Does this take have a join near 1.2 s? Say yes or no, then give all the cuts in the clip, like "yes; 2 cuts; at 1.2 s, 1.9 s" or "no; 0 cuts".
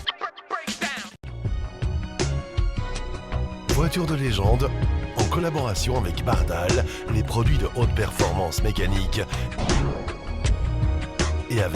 yes; 1 cut; at 1.2 s